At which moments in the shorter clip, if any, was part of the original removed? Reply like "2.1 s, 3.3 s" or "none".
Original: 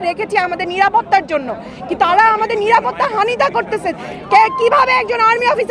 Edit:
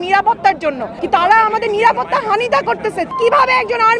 0.9 s, 3.1 s